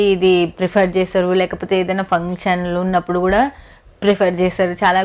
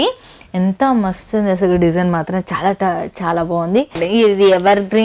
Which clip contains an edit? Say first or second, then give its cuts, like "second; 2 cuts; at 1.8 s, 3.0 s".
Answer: second; 1 cut; at 4.0 s